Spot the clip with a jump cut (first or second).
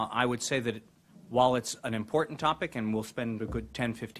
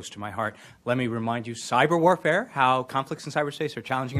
first